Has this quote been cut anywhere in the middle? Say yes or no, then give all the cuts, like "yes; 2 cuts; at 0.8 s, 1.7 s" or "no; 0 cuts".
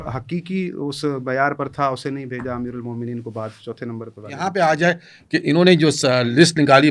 yes; 1 cut; at 4.4 s